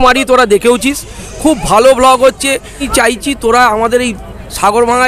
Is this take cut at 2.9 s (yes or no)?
yes